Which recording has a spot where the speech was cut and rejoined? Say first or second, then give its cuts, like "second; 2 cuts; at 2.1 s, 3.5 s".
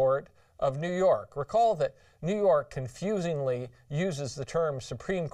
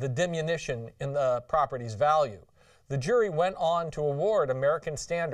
second; 1 cut; at 4.3 s